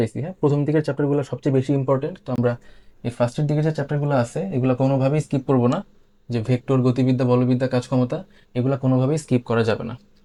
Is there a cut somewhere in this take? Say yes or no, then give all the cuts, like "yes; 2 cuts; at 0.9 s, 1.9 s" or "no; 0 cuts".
no; 0 cuts